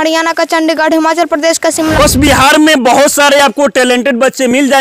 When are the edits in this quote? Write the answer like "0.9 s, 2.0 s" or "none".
1.9 s